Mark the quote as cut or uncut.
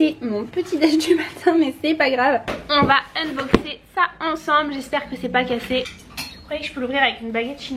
cut